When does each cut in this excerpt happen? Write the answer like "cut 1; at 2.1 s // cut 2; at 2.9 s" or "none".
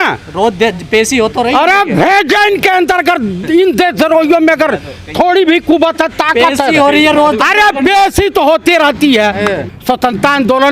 cut 1; at 9.7 s